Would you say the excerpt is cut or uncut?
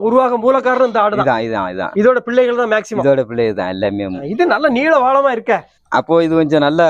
uncut